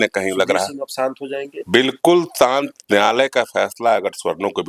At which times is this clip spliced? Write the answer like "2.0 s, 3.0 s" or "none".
none